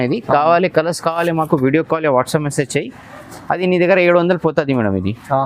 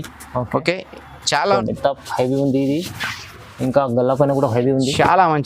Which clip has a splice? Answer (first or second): second